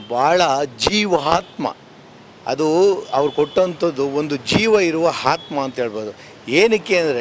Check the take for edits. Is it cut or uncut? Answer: uncut